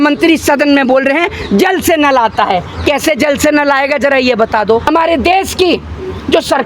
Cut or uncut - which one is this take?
cut